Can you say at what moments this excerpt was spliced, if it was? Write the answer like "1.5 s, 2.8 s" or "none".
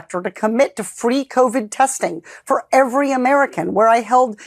none

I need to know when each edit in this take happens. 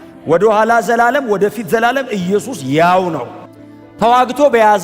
3.3 s

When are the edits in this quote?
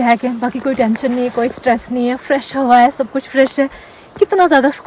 none

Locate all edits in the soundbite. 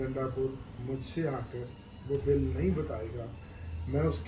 none

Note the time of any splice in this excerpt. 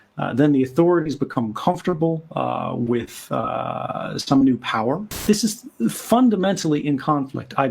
5.2 s

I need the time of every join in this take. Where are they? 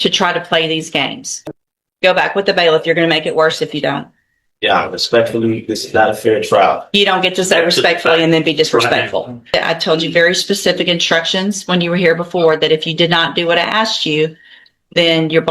1.3 s, 9.5 s

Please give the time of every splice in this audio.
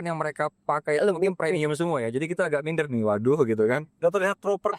none

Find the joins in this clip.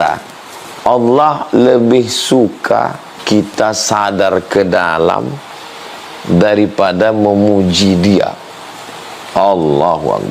3.1 s

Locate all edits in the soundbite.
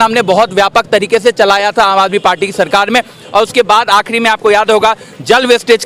none

